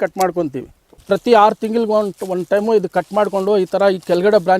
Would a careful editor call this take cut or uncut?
cut